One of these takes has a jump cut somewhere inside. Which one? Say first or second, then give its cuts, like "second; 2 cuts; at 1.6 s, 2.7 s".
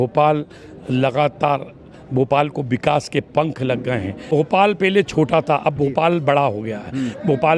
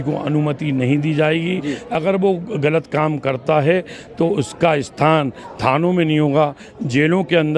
first; 1 cut; at 4.3 s